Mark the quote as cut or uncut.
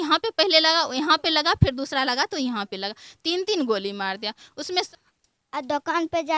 cut